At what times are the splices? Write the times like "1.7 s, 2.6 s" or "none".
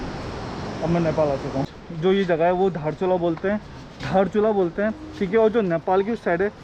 1.7 s